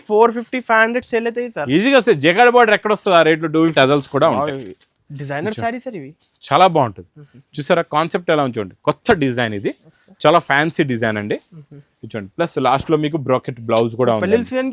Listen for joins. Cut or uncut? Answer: cut